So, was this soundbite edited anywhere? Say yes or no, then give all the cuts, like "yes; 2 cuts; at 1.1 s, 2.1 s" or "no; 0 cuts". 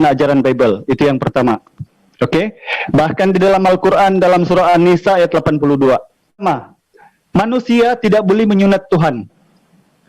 yes; 1 cut; at 6.4 s